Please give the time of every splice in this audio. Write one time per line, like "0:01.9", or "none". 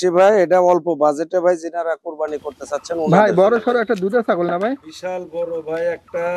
0:03.1